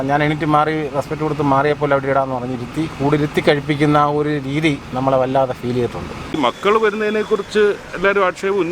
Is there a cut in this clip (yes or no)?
yes